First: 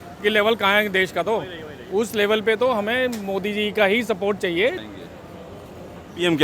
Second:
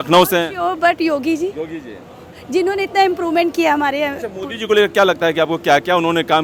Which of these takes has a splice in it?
first; 1 cut; at 4.8 s

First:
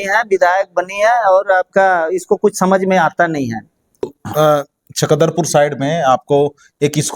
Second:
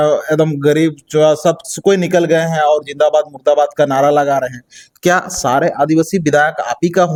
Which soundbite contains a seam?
first; 1 cut; at 4.2 s

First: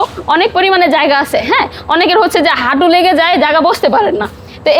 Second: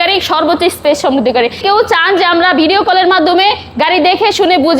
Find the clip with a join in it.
second; 1 cut; at 1.6 s

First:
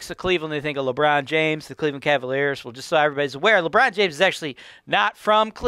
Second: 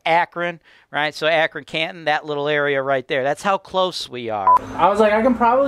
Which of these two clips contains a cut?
second; 1 cut; at 4.6 s

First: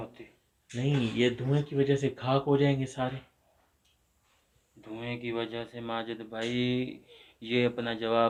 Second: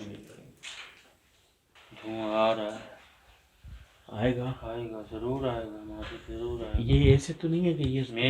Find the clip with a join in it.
second; 1 cut; at 1.8 s

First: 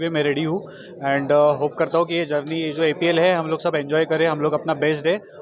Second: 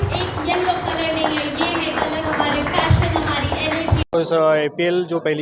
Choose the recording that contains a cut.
second; 1 cut; at 4.1 s

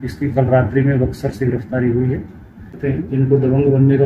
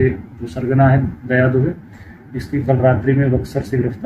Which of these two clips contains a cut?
first; 1 cut; at 2.7 s

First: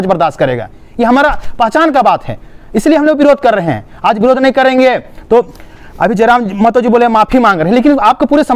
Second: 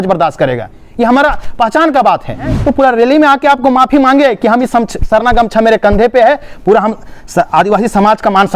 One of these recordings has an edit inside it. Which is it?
second; 1 cut; at 2.6 s

